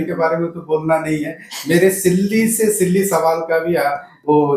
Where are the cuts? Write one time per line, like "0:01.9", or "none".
none